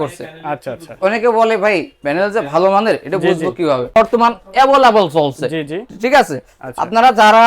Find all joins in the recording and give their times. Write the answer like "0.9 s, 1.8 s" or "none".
3.9 s